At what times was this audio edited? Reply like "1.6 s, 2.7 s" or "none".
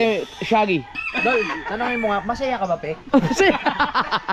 1.0 s